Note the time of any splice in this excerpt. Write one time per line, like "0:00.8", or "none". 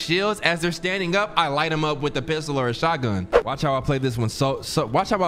0:03.3